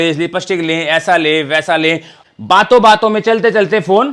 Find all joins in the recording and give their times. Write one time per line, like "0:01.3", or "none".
0:02.1